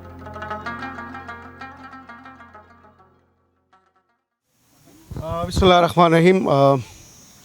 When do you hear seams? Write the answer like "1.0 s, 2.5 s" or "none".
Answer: none